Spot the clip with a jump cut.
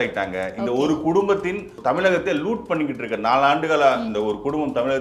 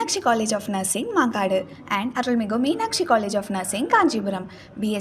first; 1 cut; at 1.8 s

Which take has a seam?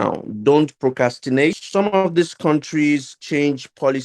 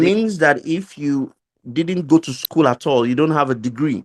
first; 1 cut; at 1.6 s

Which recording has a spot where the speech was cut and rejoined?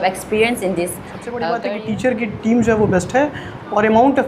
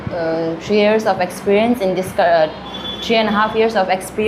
first; 1 cut; at 1.4 s

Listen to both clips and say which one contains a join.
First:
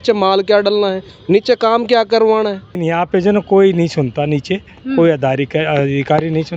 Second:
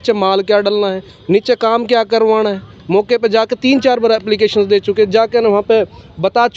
first; 1 cut; at 2.8 s

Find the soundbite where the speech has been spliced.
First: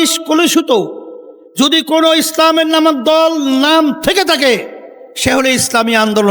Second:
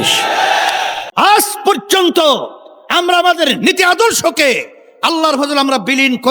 second; 1 cut; at 1.0 s

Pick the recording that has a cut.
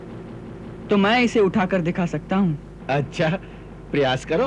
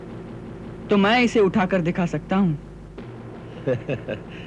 first; 1 cut; at 2.7 s

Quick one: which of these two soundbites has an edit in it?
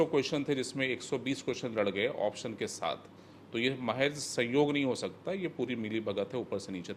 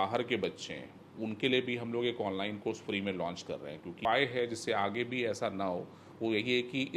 second; 1 cut; at 4.0 s

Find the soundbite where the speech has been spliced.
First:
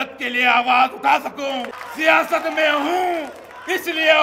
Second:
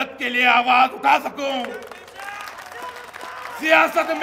first; 1 cut; at 1.8 s

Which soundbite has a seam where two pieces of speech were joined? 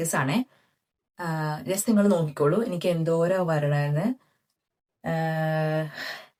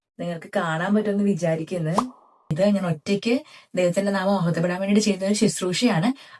second; 1 cut; at 2.4 s

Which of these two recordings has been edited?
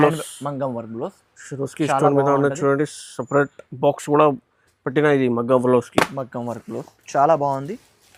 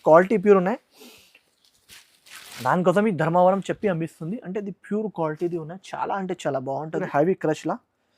second; 1 cut; at 7.1 s

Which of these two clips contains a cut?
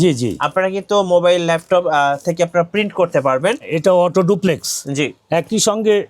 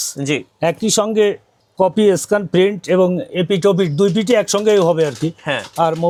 first; 1 cut; at 3.7 s

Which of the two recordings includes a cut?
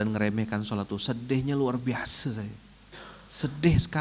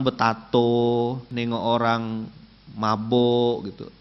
second; 1 cut; at 1.3 s

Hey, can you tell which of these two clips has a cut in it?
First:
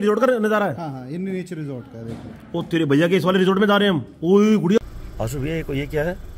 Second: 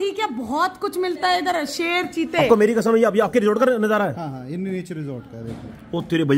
first; 1 cut; at 4.8 s

